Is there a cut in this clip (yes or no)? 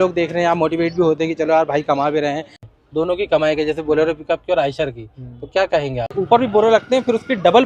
yes